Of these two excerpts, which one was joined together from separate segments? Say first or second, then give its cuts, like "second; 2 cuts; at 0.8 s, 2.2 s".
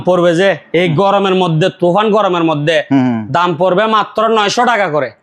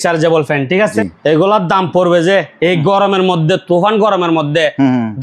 second; 1 cut; at 0.9 s